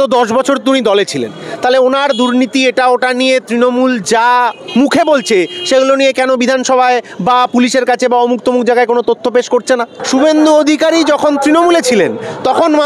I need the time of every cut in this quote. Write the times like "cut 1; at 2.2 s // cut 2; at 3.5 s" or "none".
cut 1; at 10.0 s

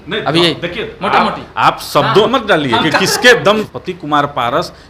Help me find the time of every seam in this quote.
cut 1; at 2.3 s // cut 2; at 3.7 s

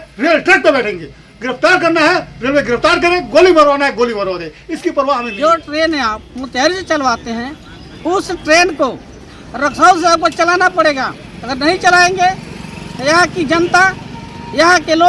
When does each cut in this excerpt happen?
cut 1; at 5.3 s

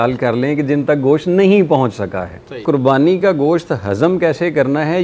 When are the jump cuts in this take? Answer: cut 1; at 2.6 s

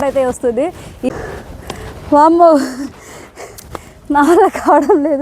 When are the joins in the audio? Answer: cut 1; at 1.1 s

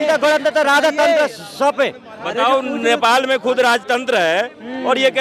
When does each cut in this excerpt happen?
none

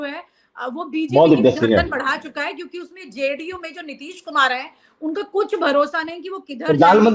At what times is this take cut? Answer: none

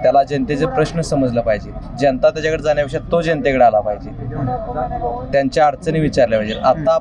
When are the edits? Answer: none

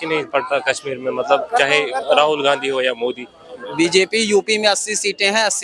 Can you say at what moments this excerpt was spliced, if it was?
cut 1; at 3.6 s

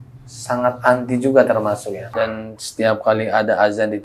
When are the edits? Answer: cut 1; at 2.0 s

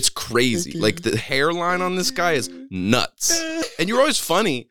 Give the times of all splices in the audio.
cut 1; at 3.7 s

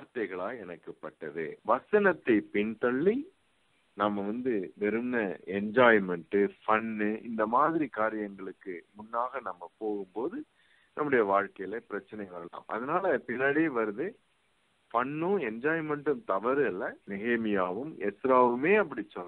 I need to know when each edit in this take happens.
cut 1; at 1.6 s

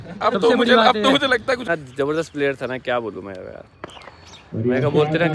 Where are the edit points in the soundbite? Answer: cut 1; at 1.6 s

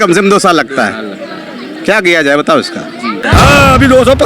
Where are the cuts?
cut 1; at 3.2 s

